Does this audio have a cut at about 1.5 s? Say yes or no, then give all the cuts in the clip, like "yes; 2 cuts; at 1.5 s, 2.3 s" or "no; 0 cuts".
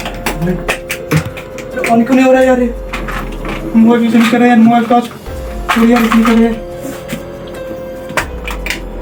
no; 0 cuts